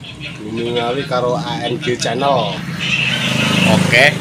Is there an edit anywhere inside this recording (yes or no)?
no